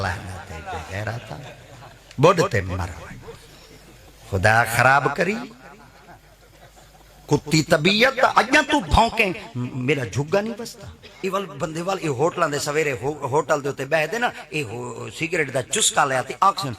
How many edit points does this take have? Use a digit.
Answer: 1